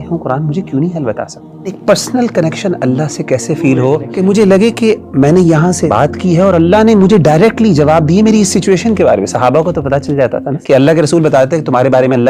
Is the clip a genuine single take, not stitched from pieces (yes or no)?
no